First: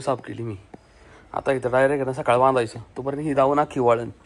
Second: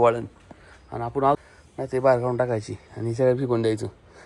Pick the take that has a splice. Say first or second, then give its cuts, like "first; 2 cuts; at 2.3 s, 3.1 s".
second; 1 cut; at 1.4 s